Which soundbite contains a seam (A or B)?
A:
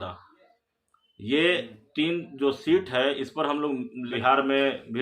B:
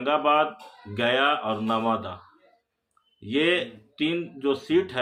A